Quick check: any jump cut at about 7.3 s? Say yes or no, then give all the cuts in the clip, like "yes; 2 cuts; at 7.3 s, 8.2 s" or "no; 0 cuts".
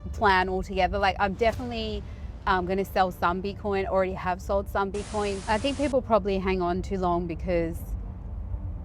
no; 1 cut; at 5.4 s